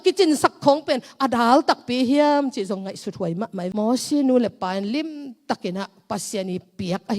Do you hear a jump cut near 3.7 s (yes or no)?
yes